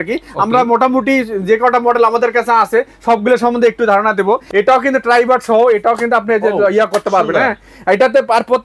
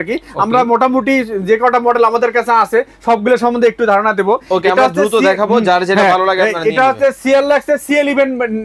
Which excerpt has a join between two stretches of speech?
first; 1 cut; at 4.4 s

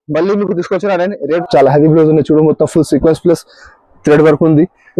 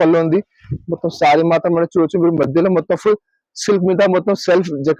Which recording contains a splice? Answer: first; 1 cut; at 1.4 s

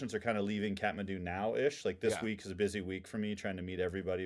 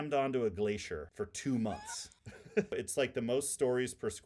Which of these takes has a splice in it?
second; 2 cuts; at 1.1 s, 2.8 s

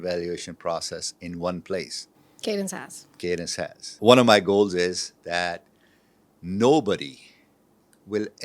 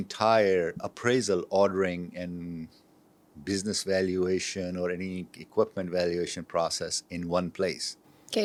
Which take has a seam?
first; 1 cut; at 4.0 s

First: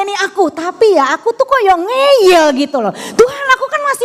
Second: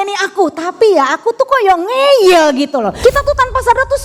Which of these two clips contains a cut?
second; 1 cut; at 2.9 s

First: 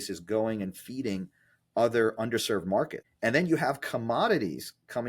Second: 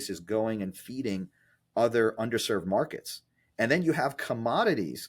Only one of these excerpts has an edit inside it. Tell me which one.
first; 1 cut; at 3.0 s

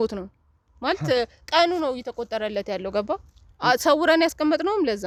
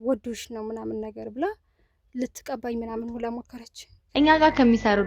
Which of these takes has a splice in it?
second; 1 cut; at 4.0 s

